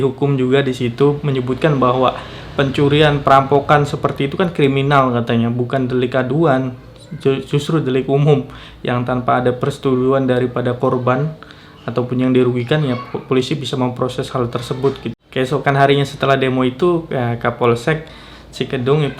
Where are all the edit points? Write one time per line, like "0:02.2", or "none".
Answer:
0:15.2